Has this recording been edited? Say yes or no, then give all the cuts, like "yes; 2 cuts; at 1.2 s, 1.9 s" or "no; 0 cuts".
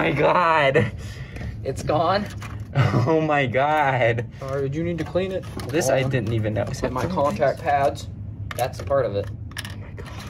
no; 0 cuts